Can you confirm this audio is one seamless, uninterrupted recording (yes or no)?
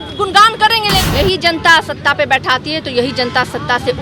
no